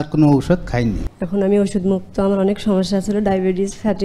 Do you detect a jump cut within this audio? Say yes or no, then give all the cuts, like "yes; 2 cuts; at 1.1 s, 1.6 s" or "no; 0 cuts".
yes; 1 cut; at 1.1 s